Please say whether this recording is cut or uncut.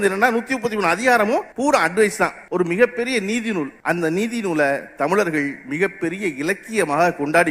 cut